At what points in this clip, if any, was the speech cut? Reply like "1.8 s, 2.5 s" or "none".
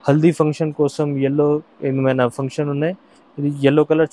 none